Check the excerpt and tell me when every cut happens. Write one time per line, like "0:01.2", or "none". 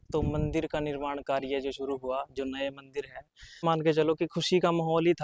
0:03.6